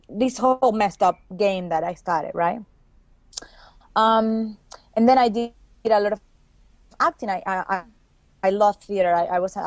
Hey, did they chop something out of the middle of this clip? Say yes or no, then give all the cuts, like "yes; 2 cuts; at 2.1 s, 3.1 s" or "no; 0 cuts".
no; 0 cuts